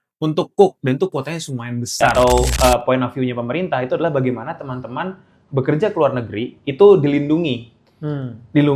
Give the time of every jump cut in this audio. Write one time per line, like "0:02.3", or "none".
0:02.1